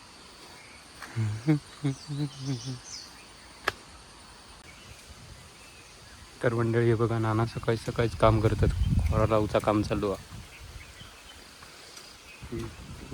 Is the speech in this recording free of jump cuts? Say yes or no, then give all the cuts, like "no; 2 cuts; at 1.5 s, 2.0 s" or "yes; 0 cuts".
no; 1 cut; at 4.6 s